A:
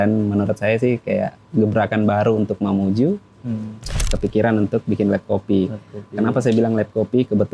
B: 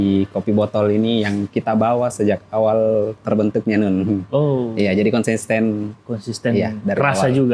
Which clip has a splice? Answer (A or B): A